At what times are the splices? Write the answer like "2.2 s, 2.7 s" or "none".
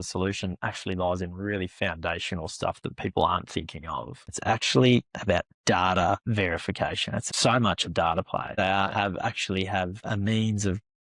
4.3 s, 7.1 s, 8.6 s